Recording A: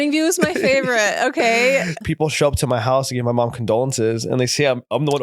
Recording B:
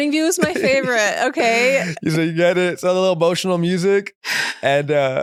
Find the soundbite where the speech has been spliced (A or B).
A